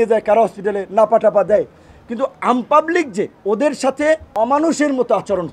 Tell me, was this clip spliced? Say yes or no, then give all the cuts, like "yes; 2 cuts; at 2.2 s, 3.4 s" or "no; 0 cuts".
yes; 2 cuts; at 3.4 s, 4.3 s